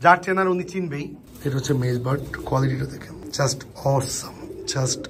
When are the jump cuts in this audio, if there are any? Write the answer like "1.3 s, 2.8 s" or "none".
1.2 s, 3.1 s

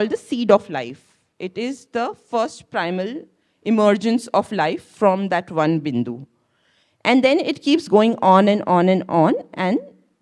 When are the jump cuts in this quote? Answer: none

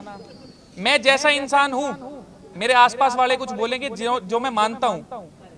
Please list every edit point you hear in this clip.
none

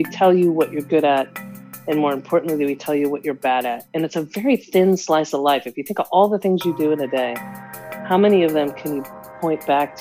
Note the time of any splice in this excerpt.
none

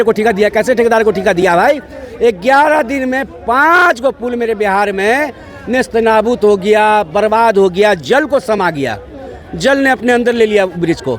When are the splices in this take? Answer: none

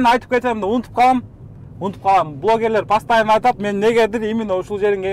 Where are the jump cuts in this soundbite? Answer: none

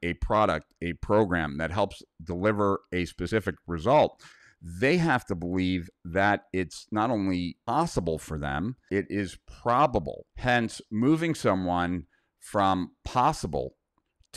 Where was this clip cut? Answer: 7.7 s, 8.8 s, 10.2 s

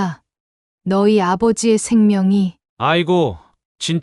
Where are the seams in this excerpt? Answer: none

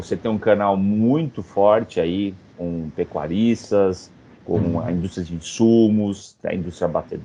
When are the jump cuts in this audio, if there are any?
none

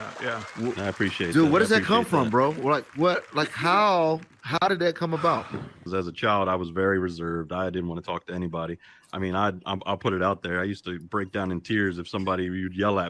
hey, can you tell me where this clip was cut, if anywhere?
5.8 s

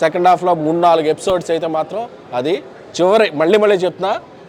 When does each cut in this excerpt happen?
none

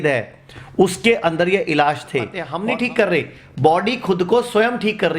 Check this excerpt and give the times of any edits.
2.5 s

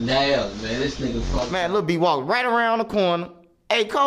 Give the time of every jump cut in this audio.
1.5 s

